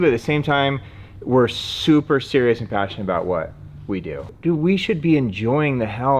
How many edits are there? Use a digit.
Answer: 1